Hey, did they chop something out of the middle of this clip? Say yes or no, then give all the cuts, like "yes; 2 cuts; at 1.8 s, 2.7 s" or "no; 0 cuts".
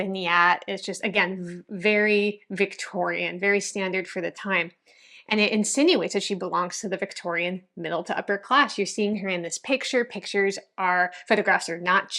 no; 0 cuts